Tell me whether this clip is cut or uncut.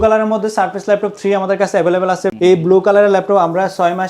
cut